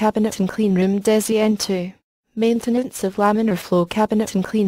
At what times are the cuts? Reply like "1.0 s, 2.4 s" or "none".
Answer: 3.6 s